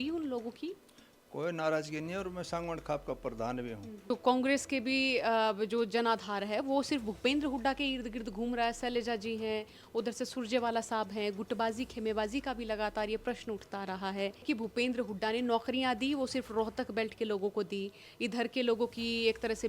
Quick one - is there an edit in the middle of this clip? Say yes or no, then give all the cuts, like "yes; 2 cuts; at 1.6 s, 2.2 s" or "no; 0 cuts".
yes; 2 cuts; at 4.1 s, 14.4 s